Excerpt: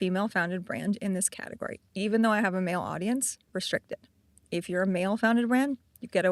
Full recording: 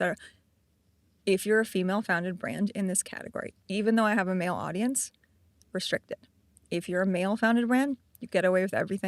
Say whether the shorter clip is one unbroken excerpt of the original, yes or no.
no